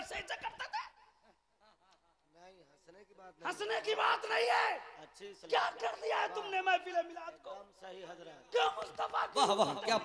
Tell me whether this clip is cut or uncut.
uncut